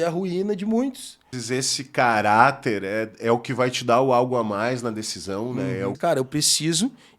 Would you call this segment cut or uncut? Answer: cut